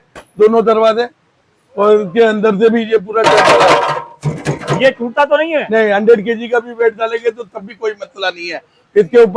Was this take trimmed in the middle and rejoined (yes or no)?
no